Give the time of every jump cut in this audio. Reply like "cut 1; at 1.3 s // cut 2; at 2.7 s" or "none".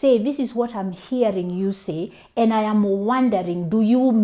none